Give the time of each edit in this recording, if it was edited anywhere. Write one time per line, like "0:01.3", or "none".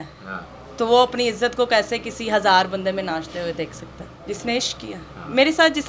0:04.2